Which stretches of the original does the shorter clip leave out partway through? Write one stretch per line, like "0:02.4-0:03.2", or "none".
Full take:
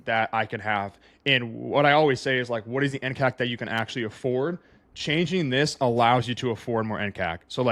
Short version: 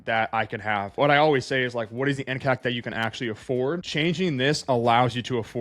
0:00.9-0:01.7
0:04.6-0:05.0